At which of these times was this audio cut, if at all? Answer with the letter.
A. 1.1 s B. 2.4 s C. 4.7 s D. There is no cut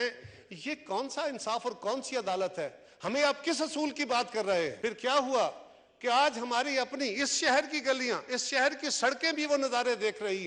C